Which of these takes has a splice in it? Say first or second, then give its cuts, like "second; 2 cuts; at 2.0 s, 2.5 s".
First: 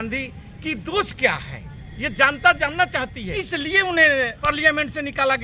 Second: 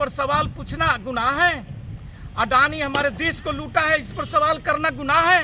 first; 2 cuts; at 3.2 s, 4.5 s